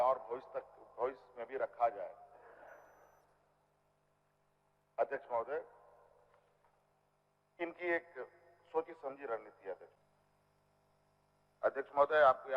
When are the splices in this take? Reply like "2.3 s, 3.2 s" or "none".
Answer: 7.6 s, 9.9 s